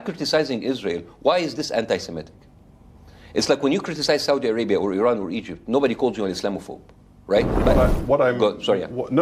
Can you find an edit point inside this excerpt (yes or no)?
yes